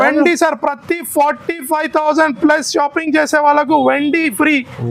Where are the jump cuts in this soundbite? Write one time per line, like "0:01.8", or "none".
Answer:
none

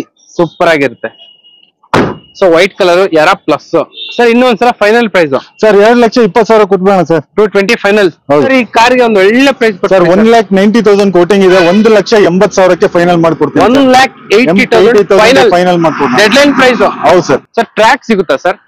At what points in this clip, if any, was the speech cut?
0:08.5
0:17.5

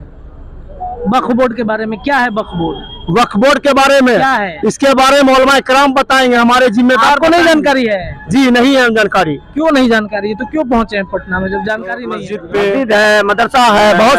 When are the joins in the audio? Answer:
0:12.3

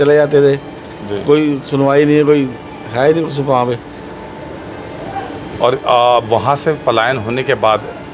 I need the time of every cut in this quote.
none

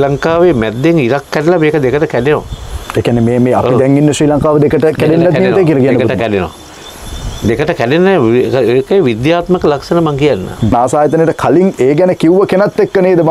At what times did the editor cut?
0:10.7

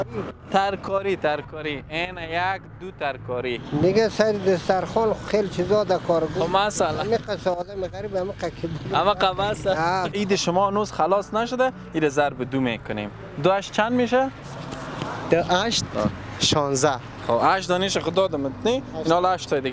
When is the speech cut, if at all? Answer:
0:03.6
0:10.1

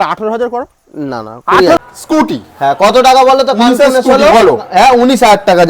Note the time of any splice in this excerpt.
0:01.8

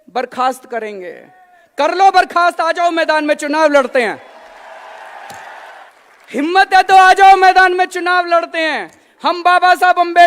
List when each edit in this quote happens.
0:05.8

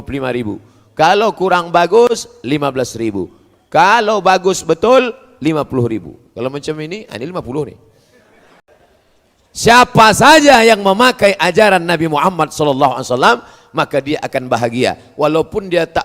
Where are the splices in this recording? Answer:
0:08.6

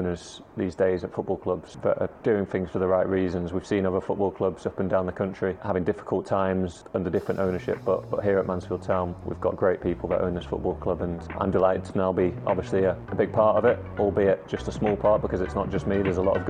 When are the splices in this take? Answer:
0:01.7
0:05.6
0:06.8
0:09.2
0:11.2
0:13.0

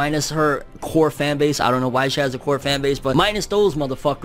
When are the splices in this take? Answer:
0:03.1

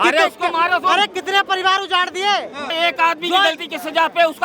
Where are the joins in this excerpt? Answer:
0:02.7

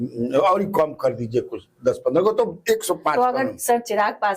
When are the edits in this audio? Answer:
none

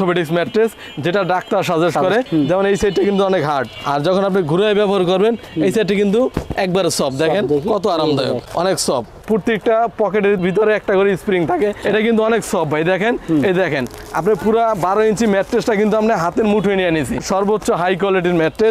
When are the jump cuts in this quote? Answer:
0:02.3
0:09.2
0:17.2

